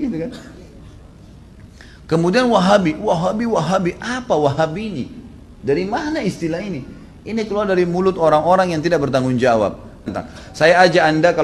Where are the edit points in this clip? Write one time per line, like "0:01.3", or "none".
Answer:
0:10.1